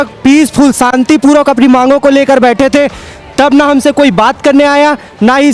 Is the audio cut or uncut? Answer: uncut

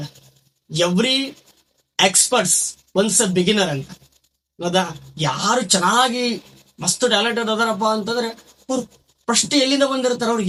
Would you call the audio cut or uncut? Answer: uncut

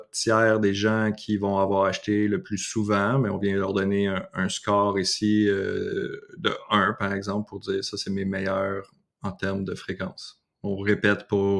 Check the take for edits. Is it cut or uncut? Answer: uncut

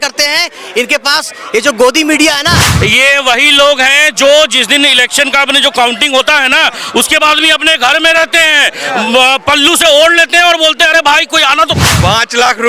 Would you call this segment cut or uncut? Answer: cut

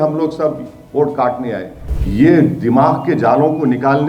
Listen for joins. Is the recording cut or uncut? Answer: cut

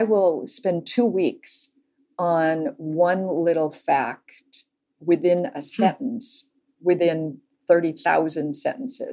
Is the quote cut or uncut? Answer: uncut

